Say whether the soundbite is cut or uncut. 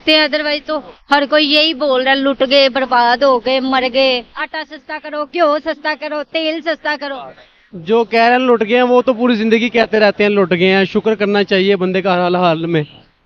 uncut